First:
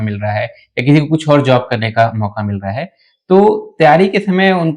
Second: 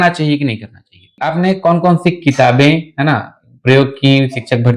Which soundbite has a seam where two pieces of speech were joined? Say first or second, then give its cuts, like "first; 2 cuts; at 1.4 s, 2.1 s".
second; 1 cut; at 1.2 s